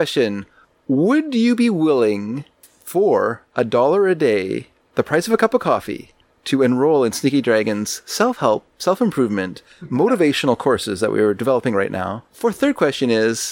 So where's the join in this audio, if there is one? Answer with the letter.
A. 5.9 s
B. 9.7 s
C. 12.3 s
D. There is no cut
C